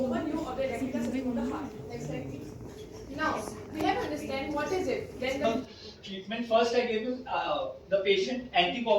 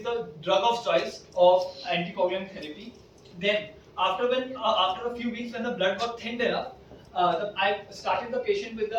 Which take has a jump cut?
first; 1 cut; at 5.4 s

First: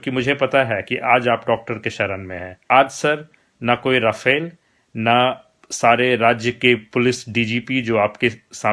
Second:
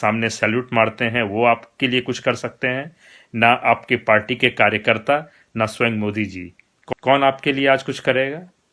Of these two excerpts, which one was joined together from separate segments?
first; 1 cut; at 2.6 s

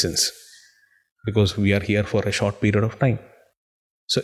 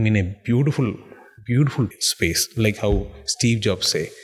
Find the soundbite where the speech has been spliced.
second; 1 cut; at 1.9 s

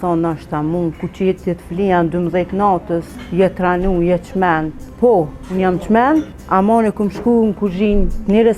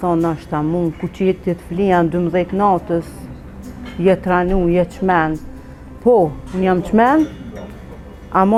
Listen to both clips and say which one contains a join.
first; 3 cuts; at 3.2 s, 4.8 s, 6.4 s

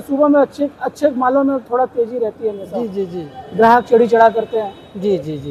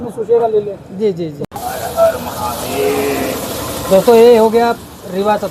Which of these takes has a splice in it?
second; 1 cut; at 1.4 s

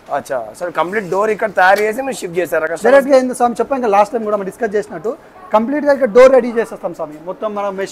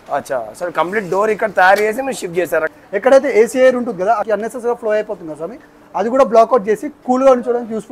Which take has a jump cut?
second; 2 cuts; at 2.7 s, 4.2 s

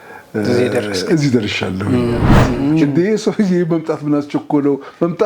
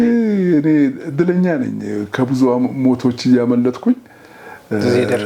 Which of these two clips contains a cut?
first; 1 cut; at 2.5 s

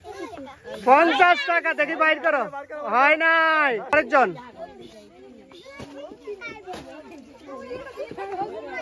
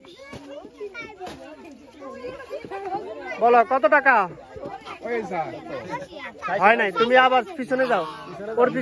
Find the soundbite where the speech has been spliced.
first; 1 cut; at 3.9 s

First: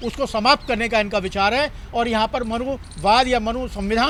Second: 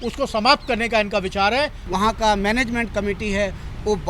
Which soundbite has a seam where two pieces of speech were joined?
second; 1 cut; at 1.8 s

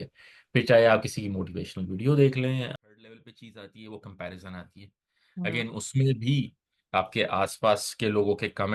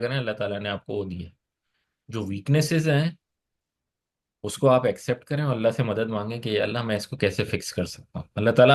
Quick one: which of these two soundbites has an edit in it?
first; 1 cut; at 2.7 s

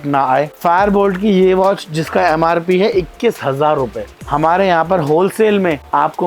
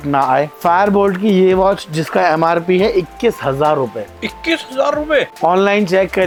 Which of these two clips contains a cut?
first; 1 cut; at 4.1 s

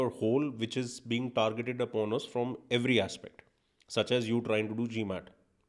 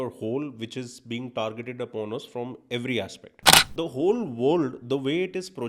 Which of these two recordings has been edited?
second; 1 cut; at 3.7 s

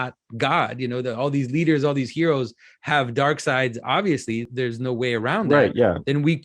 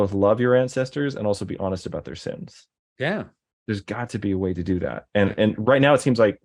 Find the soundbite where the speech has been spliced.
first; 1 cut; at 4.5 s

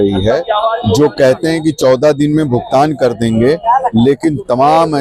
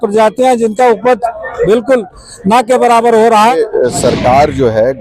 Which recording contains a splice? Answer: second; 1 cut; at 3.5 s

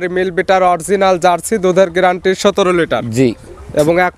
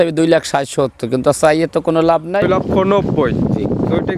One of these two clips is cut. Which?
second; 1 cut; at 2.4 s

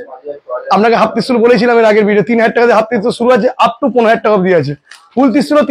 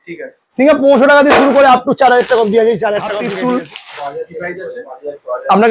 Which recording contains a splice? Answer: second; 1 cut; at 3.2 s

